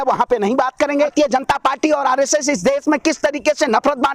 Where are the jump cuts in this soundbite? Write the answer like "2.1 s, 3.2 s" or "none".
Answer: 1.1 s